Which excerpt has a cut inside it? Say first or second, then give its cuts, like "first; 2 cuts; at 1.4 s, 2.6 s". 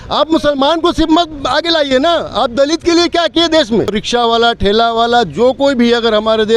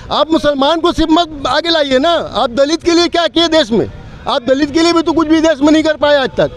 first; 1 cut; at 4.0 s